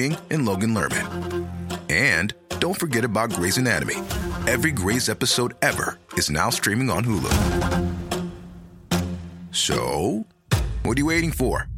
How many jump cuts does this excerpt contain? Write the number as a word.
zero